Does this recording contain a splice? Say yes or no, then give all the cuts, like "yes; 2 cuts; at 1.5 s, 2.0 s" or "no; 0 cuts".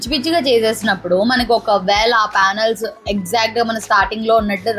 no; 0 cuts